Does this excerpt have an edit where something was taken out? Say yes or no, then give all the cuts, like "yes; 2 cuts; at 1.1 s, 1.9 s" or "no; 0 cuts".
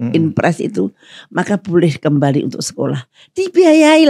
no; 0 cuts